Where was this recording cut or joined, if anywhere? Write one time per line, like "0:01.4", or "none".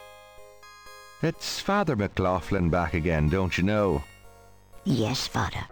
none